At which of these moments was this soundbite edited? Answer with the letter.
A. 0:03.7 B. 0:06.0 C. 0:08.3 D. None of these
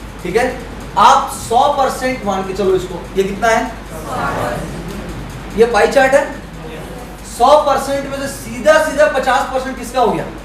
D